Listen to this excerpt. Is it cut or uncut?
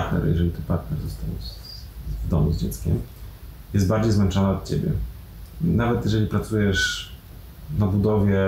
uncut